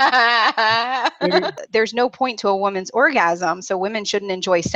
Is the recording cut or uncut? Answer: cut